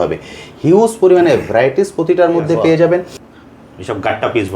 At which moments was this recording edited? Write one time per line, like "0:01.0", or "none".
0:03.2

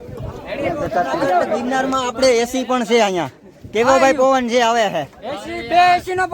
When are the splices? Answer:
0:01.6

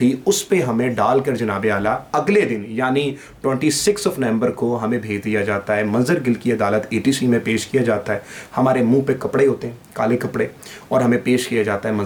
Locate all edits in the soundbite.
none

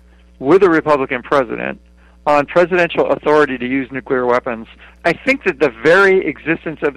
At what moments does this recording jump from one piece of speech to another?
0:05.0

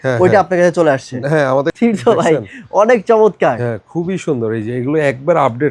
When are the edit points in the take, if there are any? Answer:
0:01.7

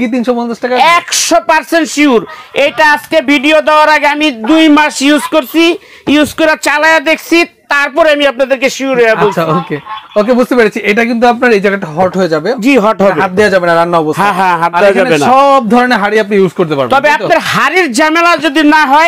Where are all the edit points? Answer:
none

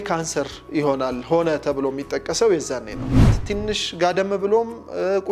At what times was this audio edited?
0:03.3

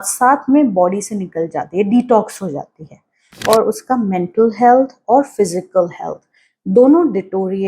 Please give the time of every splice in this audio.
0:03.2

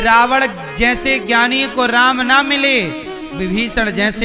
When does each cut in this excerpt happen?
none

